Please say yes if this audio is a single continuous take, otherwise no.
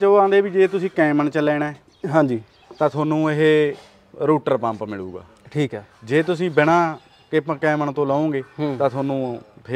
yes